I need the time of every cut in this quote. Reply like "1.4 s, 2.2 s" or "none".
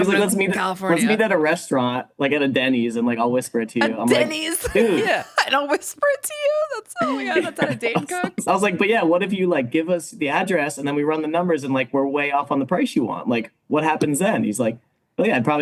8.4 s